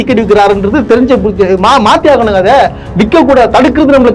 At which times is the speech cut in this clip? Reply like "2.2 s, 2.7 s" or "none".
none